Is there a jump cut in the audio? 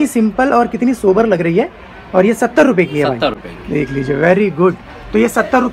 no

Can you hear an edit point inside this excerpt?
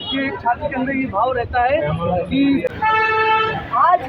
yes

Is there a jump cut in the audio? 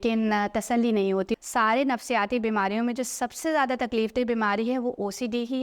yes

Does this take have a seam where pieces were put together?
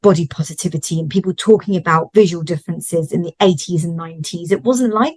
no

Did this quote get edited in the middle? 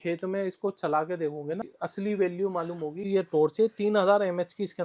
yes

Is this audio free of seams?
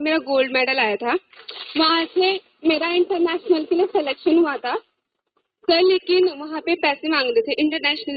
yes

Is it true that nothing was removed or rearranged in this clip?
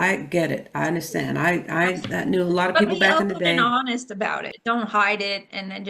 no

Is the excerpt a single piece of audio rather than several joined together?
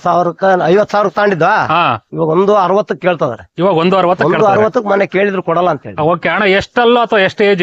yes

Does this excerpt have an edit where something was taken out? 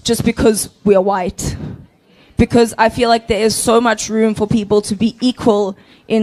no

